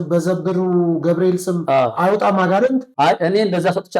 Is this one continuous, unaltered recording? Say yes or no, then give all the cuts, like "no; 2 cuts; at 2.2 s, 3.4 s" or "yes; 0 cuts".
no; 1 cut; at 2.9 s